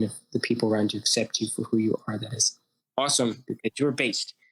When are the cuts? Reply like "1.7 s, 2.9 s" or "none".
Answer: none